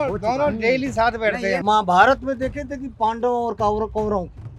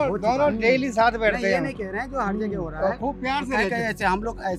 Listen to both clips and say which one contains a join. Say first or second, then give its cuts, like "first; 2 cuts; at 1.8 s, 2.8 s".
first; 1 cut; at 1.6 s